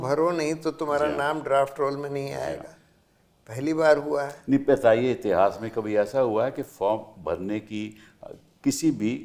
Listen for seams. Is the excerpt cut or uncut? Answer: uncut